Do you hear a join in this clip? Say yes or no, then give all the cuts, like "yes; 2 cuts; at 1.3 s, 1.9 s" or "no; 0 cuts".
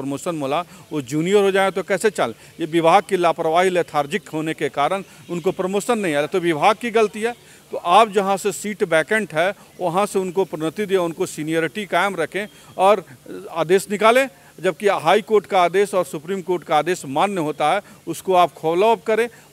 no; 0 cuts